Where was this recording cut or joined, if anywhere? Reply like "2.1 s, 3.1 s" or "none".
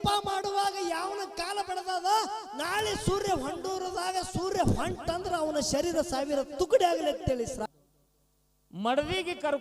7.7 s